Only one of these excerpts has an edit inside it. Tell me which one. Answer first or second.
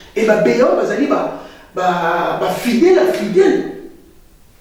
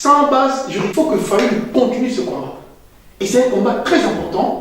second